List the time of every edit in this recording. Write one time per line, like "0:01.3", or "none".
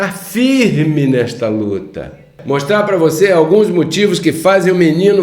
0:02.3